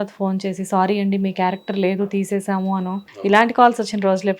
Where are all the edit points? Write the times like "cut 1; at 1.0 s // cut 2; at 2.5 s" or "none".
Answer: cut 1; at 3.1 s